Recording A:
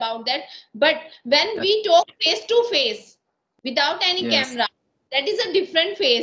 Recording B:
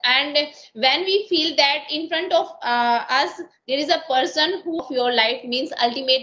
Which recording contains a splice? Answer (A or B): B